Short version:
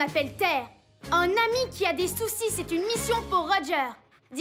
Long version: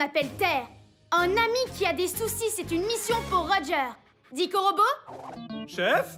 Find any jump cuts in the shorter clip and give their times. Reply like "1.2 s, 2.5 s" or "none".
none